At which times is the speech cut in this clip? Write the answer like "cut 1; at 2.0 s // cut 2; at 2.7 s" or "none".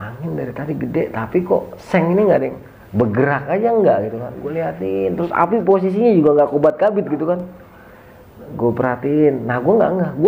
none